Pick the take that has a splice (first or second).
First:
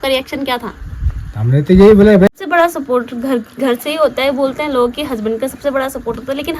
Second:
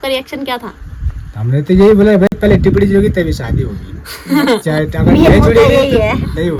first